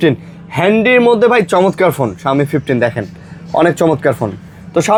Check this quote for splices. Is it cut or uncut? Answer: uncut